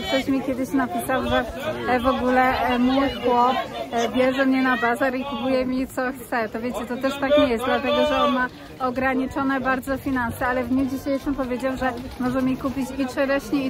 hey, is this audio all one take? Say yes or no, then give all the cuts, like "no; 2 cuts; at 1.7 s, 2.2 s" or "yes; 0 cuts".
yes; 0 cuts